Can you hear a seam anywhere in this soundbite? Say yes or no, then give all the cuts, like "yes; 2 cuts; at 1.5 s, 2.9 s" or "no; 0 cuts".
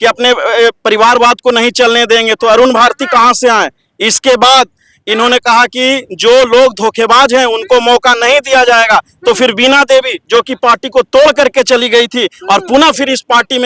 no; 0 cuts